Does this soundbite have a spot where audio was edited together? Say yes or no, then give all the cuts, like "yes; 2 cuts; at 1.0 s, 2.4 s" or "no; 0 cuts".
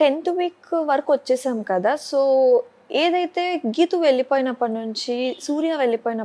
no; 0 cuts